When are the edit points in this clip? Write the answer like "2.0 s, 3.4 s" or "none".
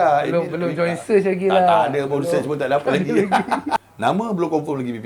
3.9 s